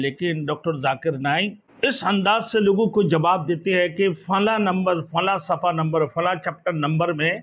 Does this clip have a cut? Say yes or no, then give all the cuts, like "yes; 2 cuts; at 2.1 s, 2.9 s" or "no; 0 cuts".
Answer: yes; 1 cut; at 1.6 s